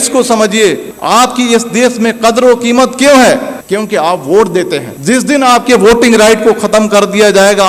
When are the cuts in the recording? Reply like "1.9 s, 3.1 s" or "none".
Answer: none